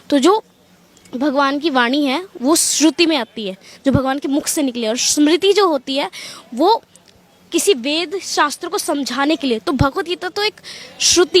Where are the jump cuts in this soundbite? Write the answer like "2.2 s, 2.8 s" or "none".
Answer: none